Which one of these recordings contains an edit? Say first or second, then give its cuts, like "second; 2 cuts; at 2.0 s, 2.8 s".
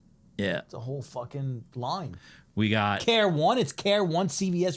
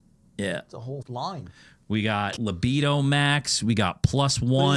second; 2 cuts; at 1.0 s, 2.3 s